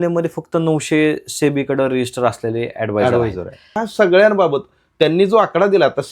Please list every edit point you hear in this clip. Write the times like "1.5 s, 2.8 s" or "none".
3.8 s